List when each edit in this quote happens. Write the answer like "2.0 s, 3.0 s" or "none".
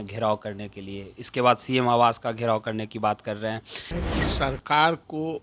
3.9 s